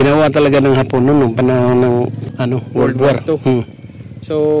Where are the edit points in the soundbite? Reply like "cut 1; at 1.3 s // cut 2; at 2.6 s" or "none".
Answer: cut 1; at 2.2 s